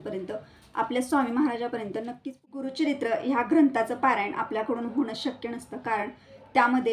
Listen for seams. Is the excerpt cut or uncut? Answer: cut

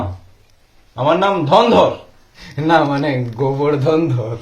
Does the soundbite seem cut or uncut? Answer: cut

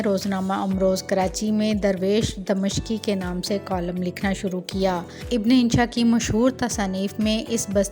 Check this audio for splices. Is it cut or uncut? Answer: cut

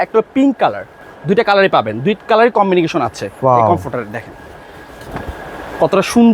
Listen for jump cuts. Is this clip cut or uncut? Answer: uncut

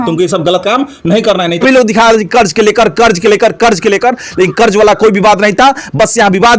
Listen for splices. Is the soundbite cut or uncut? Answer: cut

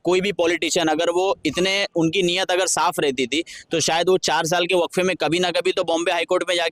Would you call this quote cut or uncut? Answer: uncut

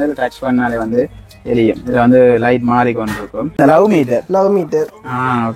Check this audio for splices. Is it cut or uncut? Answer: cut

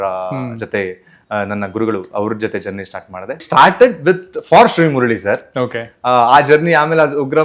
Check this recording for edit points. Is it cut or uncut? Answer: cut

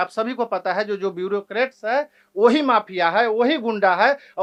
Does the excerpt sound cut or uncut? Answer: uncut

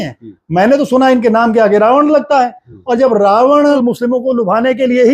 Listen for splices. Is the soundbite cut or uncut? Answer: cut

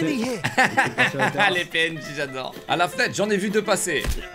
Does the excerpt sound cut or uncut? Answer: uncut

